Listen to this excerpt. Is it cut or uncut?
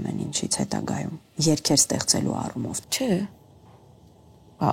cut